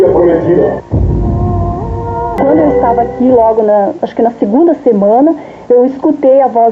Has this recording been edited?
yes; 1 cut; at 2.4 s

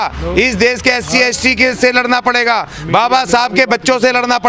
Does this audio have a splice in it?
no; 0 cuts

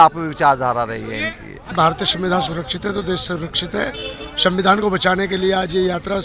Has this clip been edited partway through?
yes; 1 cut; at 1.7 s

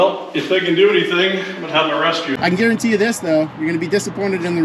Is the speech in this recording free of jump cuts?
no; 1 cut; at 2.4 s

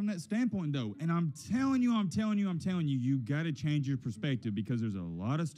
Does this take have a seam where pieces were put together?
no; 0 cuts

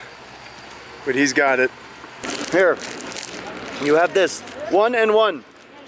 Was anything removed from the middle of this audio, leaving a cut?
yes; 1 cut; at 2.3 s

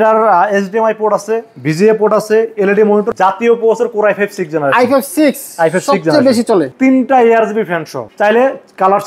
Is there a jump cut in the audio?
yes; 3 cuts; at 3.1 s, 6.7 s, 8.0 s

